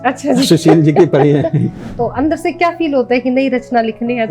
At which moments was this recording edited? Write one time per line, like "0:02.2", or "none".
0:01.8